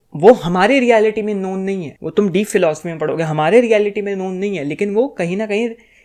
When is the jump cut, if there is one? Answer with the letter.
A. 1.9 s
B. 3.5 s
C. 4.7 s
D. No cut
A